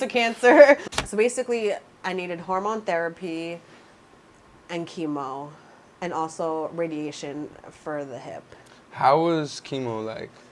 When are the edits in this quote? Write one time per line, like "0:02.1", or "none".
0:01.0